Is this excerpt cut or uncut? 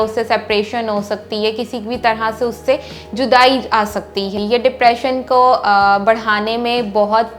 cut